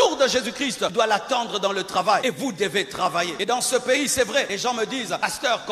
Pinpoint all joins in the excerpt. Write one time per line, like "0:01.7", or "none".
0:00.9
0:02.2
0:03.4
0:04.8